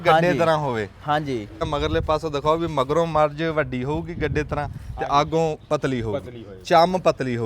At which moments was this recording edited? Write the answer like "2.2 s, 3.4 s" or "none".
1.7 s

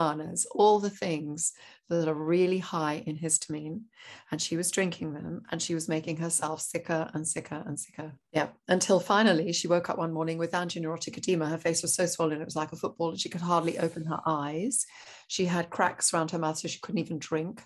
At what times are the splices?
8.3 s

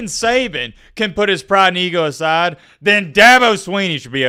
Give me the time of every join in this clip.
none

